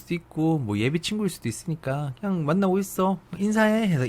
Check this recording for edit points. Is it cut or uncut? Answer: uncut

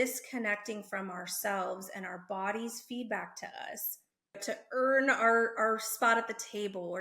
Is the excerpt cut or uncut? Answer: cut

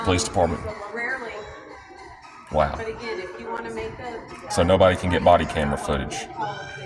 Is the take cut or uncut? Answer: uncut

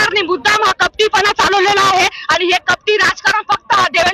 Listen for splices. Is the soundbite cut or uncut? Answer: uncut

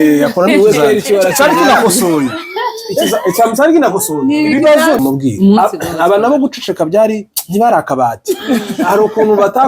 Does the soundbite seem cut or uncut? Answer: cut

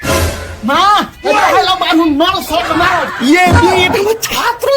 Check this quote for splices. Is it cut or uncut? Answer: uncut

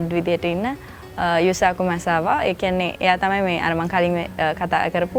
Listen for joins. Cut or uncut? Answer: uncut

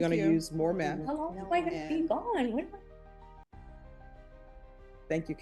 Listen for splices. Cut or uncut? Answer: cut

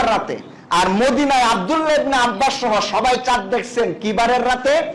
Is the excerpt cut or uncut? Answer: uncut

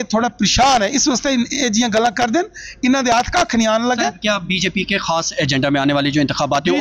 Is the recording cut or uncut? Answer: uncut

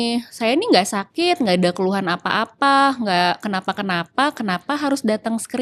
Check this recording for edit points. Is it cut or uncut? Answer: uncut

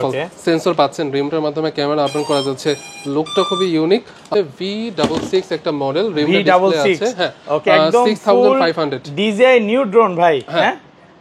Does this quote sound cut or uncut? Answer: cut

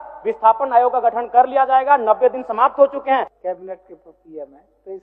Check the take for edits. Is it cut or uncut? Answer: cut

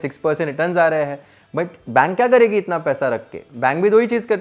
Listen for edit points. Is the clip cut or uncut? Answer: uncut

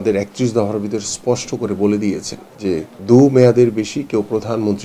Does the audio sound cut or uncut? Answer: cut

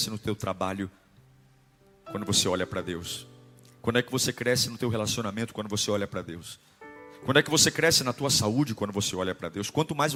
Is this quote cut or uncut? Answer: uncut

